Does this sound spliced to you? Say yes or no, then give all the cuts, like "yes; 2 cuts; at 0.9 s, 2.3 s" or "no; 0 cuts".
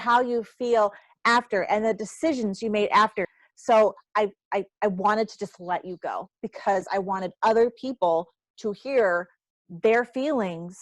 yes; 1 cut; at 3.2 s